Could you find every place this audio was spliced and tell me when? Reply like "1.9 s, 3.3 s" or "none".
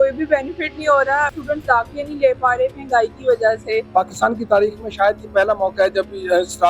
1.3 s, 3.9 s